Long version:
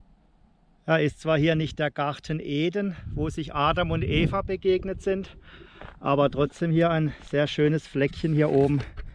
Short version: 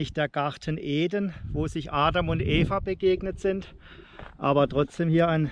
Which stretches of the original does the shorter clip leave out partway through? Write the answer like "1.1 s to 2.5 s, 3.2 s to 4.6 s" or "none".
none